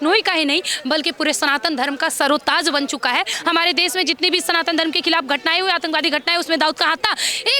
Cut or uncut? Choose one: cut